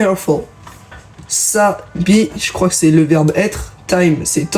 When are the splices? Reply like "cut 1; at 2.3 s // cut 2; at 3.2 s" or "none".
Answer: cut 1; at 2.3 s